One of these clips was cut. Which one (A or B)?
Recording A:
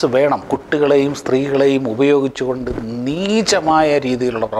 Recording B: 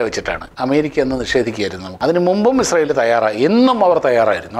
B